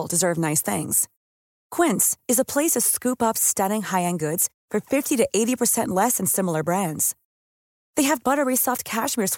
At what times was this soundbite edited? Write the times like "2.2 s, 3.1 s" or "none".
none